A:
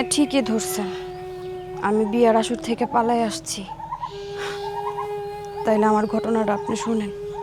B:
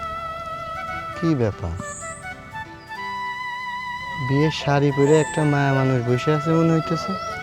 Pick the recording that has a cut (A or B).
B